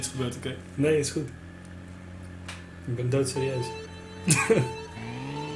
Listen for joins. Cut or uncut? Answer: uncut